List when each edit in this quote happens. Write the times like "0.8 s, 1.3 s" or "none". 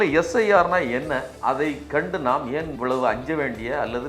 1.3 s, 2.7 s